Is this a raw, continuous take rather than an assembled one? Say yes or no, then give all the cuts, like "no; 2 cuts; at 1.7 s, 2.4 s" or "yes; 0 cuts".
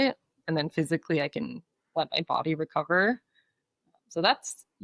yes; 0 cuts